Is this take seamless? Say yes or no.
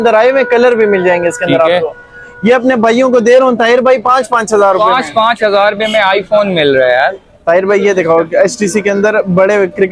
yes